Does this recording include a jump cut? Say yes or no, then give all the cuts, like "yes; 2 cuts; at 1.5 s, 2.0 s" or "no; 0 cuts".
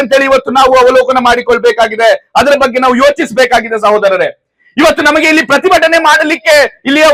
no; 0 cuts